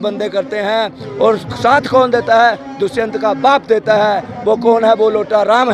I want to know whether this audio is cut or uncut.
uncut